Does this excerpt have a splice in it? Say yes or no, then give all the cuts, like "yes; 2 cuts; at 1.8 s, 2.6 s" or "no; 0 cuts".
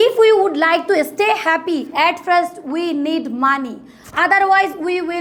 no; 0 cuts